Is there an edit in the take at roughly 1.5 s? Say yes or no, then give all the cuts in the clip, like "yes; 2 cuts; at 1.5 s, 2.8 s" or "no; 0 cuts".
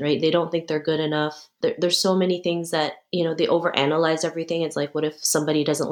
yes; 2 cuts; at 1.5 s, 3.0 s